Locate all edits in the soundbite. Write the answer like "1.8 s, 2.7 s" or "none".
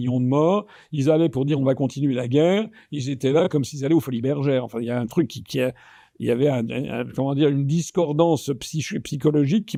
none